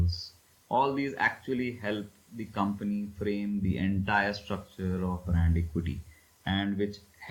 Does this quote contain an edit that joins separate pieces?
no; 0 cuts

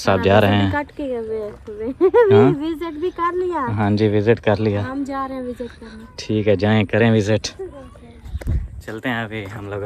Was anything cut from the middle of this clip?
no; 0 cuts

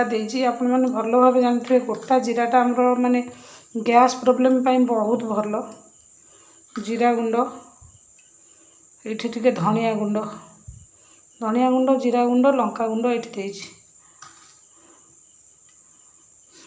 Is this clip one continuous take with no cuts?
yes; 0 cuts

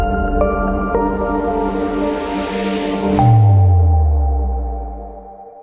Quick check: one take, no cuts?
yes; 0 cuts

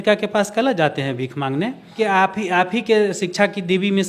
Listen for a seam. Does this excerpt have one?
no; 0 cuts

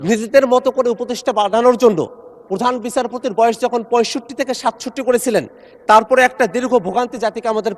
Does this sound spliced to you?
no; 0 cuts

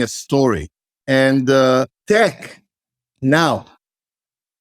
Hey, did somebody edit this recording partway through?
yes; 2 cuts; at 1.0 s, 2.0 s

